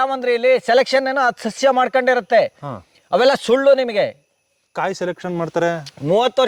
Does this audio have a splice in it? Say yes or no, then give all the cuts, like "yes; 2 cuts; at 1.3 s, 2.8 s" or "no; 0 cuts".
no; 0 cuts